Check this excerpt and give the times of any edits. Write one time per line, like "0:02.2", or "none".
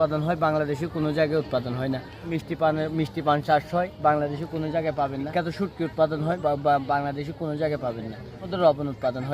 0:02.3
0:05.3
0:06.4
0:08.5